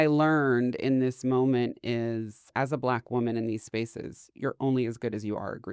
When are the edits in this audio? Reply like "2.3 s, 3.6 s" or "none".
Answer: 2.5 s